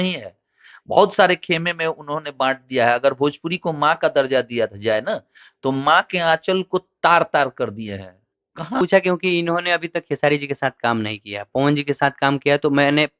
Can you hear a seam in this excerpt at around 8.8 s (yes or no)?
yes